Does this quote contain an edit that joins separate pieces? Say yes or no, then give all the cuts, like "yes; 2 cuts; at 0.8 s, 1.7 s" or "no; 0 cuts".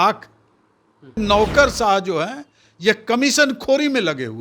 yes; 1 cut; at 1.2 s